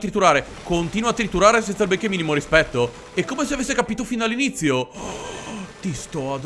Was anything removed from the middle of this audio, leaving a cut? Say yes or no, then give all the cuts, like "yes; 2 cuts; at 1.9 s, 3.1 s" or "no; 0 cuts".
no; 0 cuts